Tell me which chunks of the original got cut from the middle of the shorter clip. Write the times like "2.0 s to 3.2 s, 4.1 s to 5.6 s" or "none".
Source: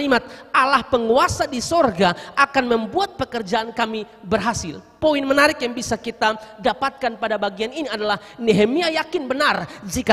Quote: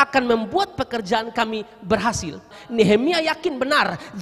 4.9 s to 8.2 s